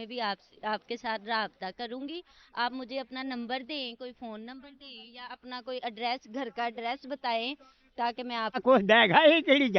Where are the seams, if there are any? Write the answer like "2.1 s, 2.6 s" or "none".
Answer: 8.6 s